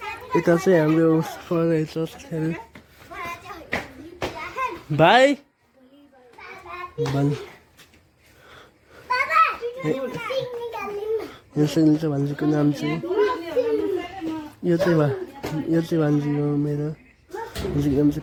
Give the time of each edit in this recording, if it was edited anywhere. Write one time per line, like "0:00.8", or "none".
none